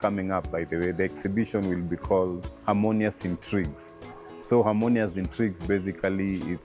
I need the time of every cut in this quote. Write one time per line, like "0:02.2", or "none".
0:02.5

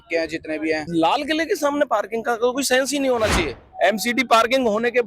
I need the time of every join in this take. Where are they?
0:00.8
0:03.7

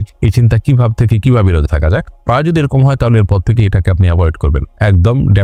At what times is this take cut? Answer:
none

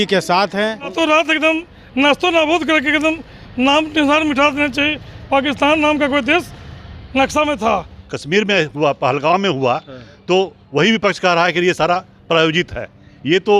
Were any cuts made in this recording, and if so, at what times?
0:00.9
0:08.0

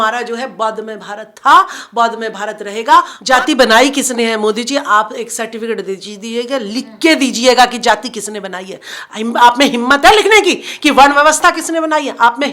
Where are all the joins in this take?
0:03.2

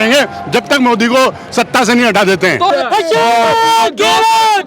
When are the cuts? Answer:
0:02.7

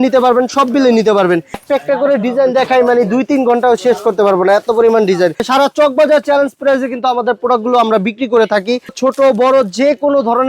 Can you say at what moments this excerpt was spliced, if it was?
0:01.6
0:05.5
0:09.0

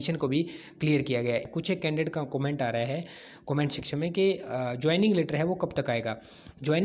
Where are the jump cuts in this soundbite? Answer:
0:01.4

